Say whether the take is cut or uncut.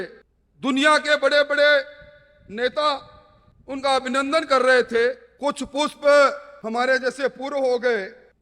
cut